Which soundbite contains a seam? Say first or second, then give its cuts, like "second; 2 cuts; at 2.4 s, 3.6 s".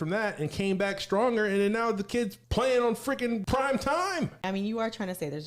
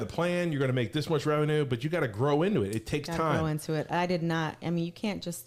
first; 3 cuts; at 2.4 s, 3.4 s, 4.4 s